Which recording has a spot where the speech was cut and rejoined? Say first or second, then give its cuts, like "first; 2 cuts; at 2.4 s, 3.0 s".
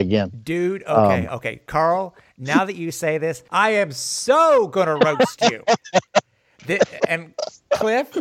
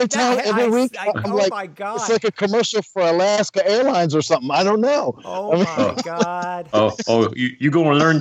first; 2 cuts; at 1.6 s, 3.4 s